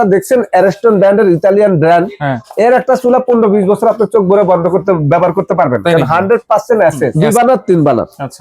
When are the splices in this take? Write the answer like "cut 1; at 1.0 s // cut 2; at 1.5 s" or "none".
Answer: cut 1; at 7.1 s